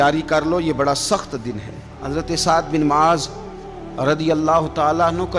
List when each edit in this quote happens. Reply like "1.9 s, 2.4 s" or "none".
1.9 s